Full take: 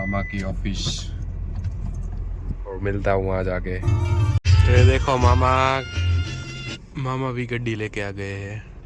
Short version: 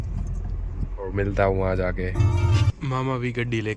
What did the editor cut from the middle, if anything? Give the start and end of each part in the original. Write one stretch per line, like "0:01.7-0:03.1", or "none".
0:04.3-0:06.8